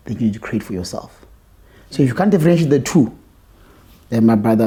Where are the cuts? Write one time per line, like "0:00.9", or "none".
none